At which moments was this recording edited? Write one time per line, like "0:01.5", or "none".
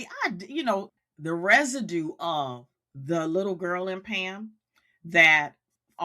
0:01.0